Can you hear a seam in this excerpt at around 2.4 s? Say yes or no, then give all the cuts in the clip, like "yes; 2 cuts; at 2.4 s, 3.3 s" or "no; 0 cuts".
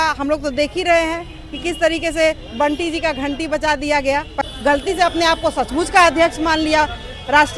no; 1 cut; at 4.3 s